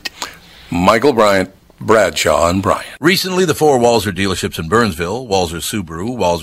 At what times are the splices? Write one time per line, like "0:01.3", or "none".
0:02.9